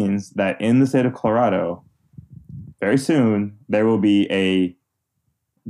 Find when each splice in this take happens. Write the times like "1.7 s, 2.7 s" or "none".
none